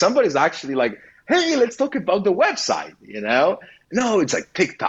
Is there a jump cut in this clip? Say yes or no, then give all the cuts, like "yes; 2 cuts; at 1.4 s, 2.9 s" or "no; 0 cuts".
yes; 1 cut; at 3.7 s